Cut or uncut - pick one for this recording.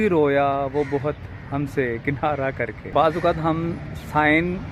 cut